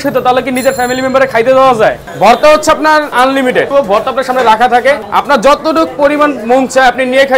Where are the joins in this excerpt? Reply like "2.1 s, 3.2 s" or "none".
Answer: 2.1 s, 3.7 s, 5.1 s